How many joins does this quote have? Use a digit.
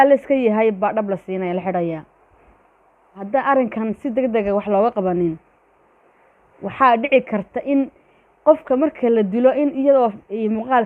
1